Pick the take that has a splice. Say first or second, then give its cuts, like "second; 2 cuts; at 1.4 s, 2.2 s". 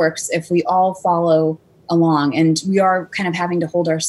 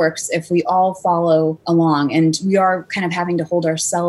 second; 1 cut; at 1.6 s